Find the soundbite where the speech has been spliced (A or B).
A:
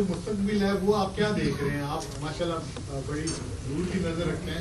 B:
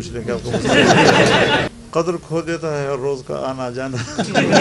B